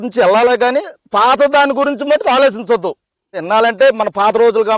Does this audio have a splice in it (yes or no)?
yes